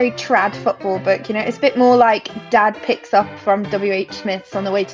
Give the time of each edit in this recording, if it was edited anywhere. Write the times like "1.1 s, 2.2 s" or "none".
none